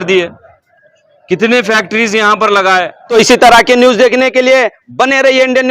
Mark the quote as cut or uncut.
cut